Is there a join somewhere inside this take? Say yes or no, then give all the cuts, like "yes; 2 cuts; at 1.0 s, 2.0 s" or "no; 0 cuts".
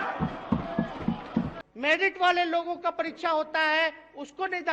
yes; 1 cut; at 1.5 s